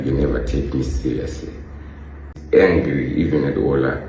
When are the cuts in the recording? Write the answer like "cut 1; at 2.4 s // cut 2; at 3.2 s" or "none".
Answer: cut 1; at 2.4 s